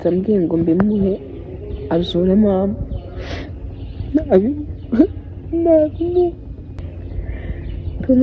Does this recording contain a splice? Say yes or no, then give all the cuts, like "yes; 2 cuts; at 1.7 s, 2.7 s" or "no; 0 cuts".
yes; 1 cut; at 6.8 s